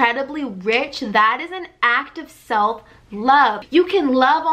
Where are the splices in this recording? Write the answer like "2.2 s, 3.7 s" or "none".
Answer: 3.6 s